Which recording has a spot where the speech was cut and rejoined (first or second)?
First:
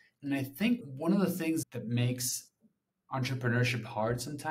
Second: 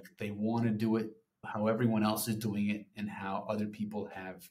first